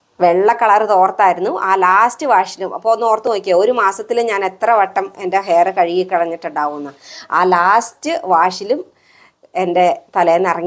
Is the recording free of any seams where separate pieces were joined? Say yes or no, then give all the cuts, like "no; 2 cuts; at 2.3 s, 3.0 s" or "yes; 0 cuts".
yes; 0 cuts